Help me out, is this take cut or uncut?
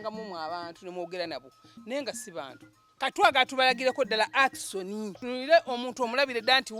cut